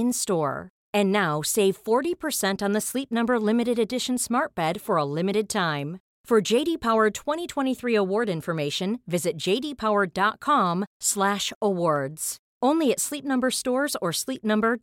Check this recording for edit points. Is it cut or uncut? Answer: uncut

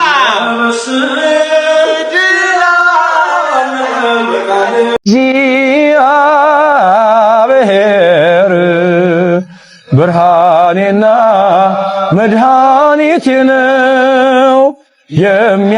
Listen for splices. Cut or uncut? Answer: cut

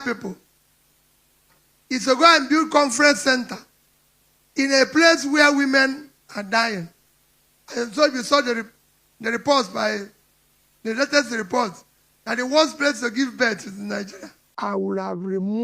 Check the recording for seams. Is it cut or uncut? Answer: cut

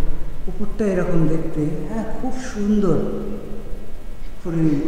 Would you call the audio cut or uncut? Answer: uncut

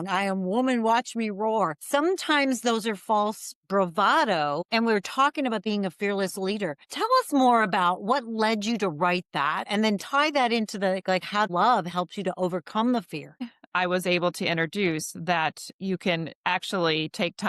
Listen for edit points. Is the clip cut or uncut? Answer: cut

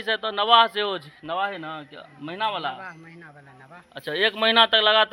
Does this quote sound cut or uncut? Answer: uncut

